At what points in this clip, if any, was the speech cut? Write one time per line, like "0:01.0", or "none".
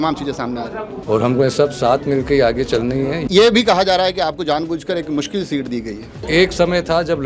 0:00.9
0:03.2
0:06.1